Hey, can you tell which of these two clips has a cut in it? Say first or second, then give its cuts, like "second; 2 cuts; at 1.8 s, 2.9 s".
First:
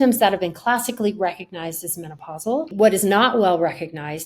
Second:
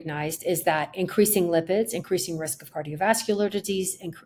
first; 1 cut; at 2.7 s